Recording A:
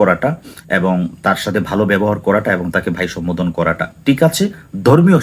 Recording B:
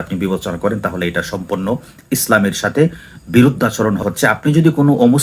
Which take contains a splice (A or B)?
B